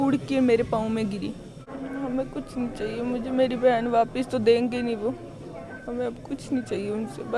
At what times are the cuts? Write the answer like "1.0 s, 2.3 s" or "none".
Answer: 1.6 s